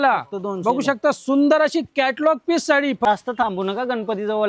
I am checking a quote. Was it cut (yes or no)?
yes